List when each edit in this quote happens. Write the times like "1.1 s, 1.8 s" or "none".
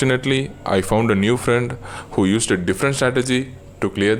none